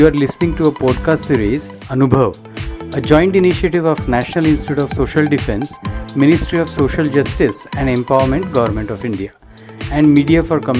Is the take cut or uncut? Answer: uncut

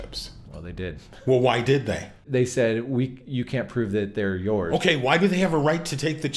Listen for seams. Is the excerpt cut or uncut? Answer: cut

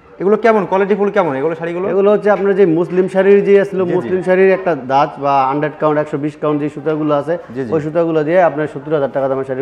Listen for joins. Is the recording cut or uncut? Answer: uncut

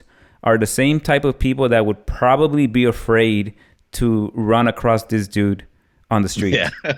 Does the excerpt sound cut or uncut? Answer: uncut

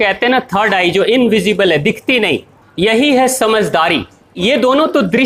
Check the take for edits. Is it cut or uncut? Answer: uncut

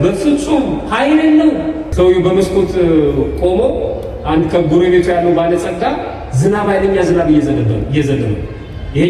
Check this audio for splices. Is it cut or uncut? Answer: cut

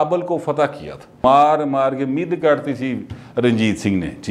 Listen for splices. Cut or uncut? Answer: cut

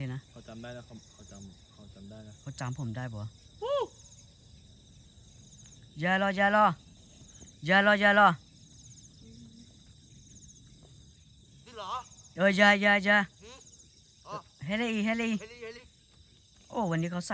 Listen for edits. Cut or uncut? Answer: uncut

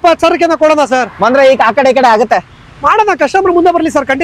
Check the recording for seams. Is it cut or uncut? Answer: uncut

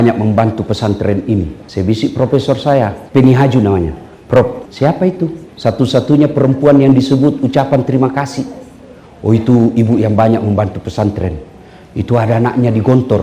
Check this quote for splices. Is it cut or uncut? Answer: cut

